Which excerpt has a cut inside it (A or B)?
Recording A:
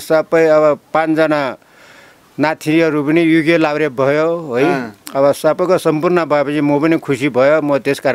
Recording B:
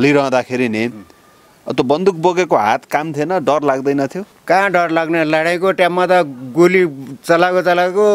B